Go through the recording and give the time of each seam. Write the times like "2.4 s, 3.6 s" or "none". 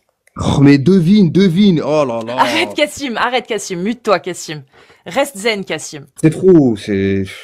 6.1 s